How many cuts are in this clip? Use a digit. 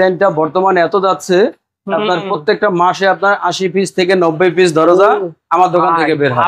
0